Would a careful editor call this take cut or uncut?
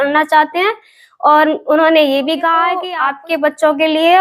cut